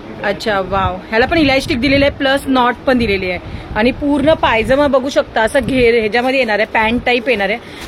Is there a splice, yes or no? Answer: no